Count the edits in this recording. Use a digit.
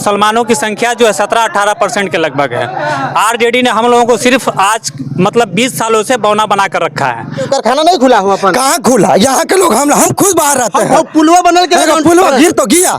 1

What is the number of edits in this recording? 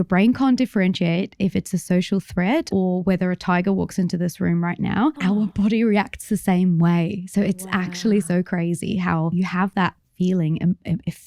3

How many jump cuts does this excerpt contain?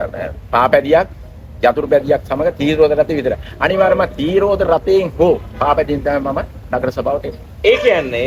0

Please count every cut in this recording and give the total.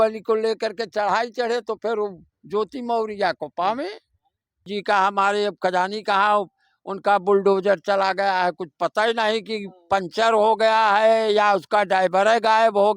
1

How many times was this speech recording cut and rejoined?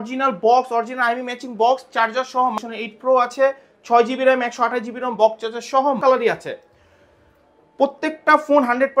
2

